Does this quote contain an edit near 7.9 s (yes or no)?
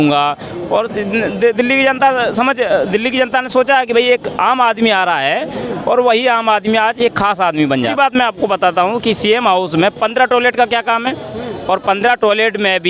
yes